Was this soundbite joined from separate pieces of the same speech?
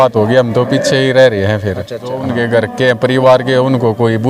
yes; 1 cut; at 2.2 s

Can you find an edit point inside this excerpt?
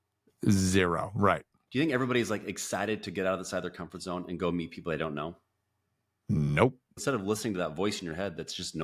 yes; 2 cuts; at 1.5 s, 7.0 s

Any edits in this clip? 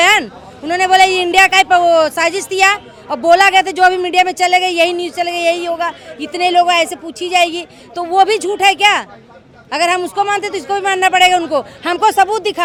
no; 0 cuts

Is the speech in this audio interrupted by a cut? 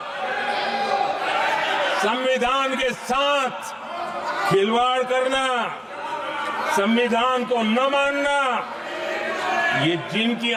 no; 0 cuts

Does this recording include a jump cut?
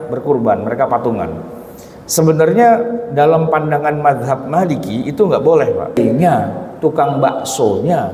yes; 1 cut; at 6.0 s

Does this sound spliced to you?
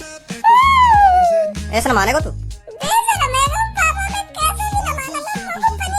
yes; 1 cut; at 1.5 s

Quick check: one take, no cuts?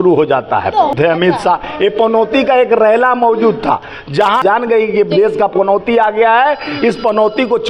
no; 2 cuts; at 0.9 s, 4.4 s

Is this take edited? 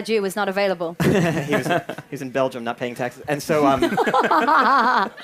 no; 0 cuts

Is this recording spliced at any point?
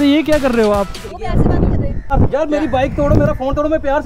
yes; 2 cuts; at 1.0 s, 2.1 s

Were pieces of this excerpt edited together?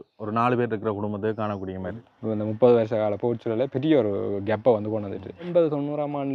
yes; 2 cuts; at 2.0 s, 5.4 s

